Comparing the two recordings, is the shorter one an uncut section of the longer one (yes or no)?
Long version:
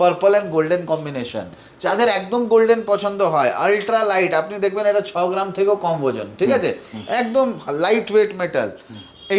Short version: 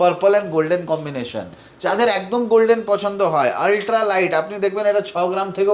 yes